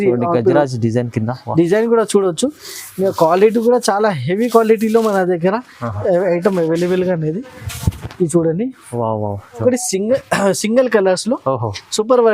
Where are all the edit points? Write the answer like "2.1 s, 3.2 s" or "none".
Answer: 9.6 s